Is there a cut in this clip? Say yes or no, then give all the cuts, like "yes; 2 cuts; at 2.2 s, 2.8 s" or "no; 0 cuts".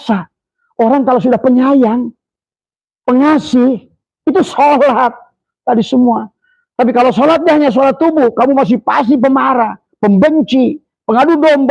no; 0 cuts